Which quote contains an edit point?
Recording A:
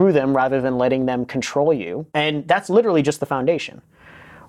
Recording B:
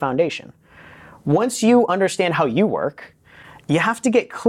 A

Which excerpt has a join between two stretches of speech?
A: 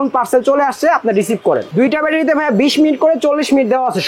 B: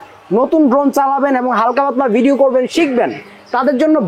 A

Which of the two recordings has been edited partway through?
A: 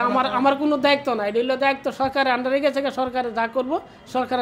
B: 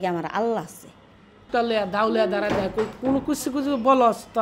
B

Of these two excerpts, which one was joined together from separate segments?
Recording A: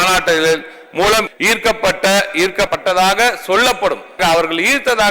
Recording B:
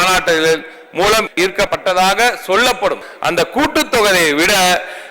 B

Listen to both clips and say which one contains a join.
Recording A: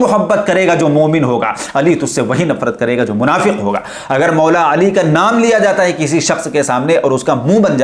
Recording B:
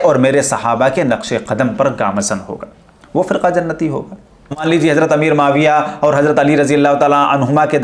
B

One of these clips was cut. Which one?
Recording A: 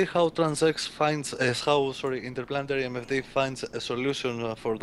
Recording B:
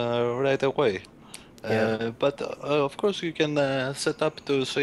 A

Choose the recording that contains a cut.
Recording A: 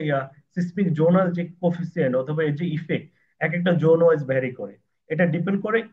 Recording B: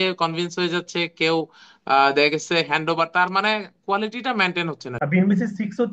B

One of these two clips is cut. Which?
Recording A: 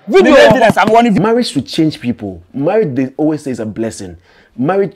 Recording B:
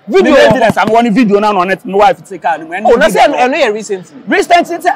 A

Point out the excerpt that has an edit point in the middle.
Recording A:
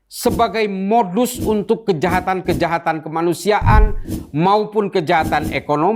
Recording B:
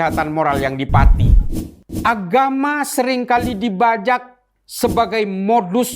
B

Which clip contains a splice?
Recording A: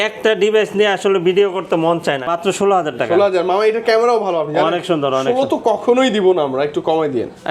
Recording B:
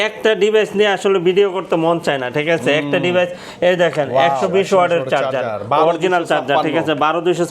A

